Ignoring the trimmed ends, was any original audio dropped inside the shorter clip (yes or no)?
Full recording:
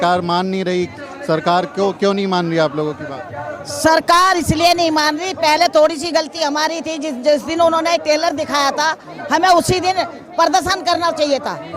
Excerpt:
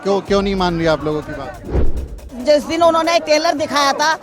yes